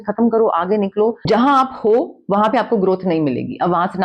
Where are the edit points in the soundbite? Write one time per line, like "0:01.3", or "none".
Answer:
0:01.3